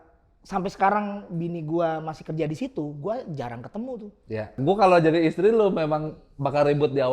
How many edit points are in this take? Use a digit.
1